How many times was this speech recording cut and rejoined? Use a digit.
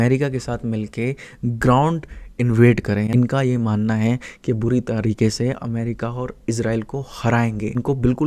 1